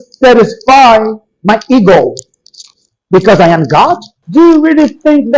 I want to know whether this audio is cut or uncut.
cut